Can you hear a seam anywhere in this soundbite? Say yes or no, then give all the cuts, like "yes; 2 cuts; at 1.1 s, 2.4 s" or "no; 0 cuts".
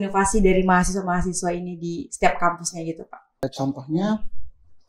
yes; 1 cut; at 3.4 s